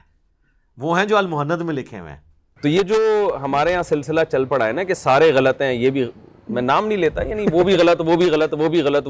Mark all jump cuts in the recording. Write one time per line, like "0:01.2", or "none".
0:02.5

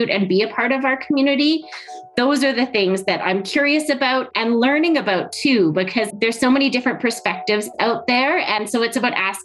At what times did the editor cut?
0:04.3
0:06.1
0:08.6

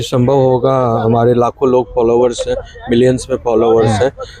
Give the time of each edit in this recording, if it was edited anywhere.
none

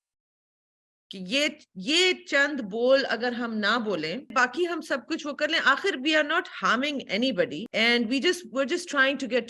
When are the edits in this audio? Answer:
0:04.3
0:07.6

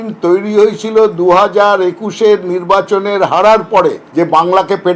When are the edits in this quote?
0:04.0

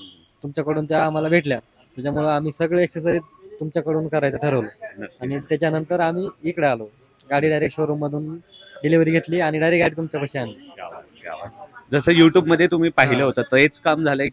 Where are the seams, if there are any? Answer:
none

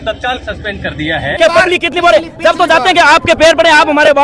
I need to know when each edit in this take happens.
0:01.4

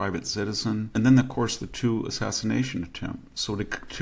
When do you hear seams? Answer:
0:00.9

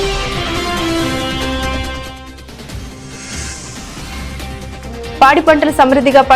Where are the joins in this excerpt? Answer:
0:05.2

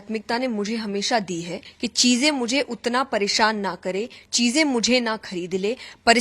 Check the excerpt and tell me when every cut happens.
0:01.6

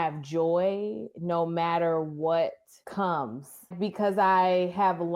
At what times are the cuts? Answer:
0:02.7
0:03.7

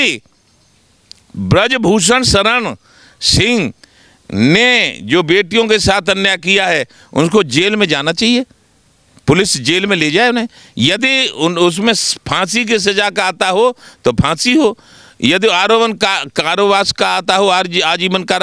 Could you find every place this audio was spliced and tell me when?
none

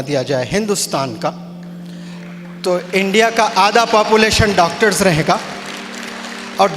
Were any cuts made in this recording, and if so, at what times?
none

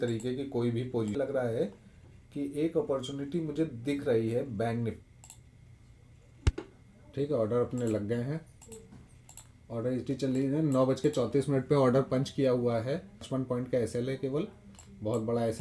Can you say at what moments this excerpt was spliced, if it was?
0:01.2
0:05.0
0:13.2

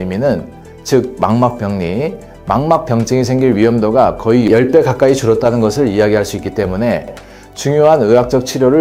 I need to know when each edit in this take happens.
none

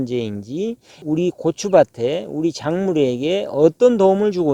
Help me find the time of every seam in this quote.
0:00.9

